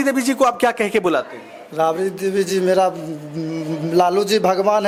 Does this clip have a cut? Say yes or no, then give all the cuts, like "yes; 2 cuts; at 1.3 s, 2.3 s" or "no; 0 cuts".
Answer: no; 0 cuts